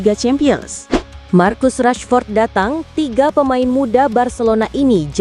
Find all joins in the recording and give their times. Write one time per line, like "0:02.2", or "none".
0:01.2